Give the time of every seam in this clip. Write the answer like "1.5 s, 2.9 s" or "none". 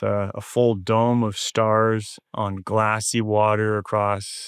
2.2 s